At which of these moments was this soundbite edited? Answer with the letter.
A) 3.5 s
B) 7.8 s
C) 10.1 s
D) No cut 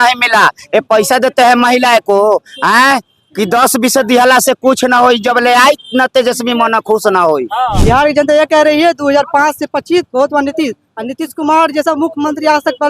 B